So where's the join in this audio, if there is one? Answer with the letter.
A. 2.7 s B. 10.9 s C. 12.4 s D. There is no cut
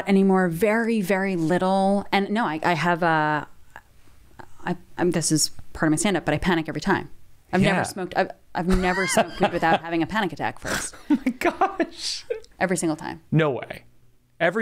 C